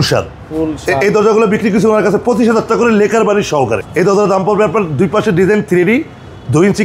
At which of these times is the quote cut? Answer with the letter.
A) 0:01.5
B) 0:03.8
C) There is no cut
B